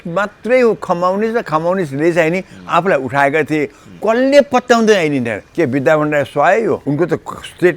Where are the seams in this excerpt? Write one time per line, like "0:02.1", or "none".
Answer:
0:05.4
0:06.8